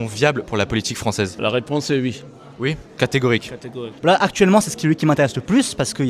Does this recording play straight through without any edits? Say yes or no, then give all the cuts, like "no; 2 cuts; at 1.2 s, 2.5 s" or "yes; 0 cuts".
no; 2 cuts; at 1.3 s, 3.9 s